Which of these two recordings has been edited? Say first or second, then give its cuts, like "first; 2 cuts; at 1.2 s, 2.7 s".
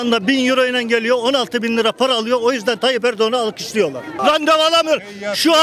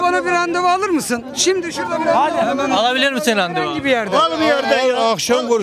first; 1 cut; at 4.1 s